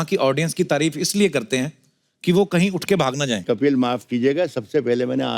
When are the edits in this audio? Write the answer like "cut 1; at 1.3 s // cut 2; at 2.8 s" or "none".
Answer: cut 1; at 3.4 s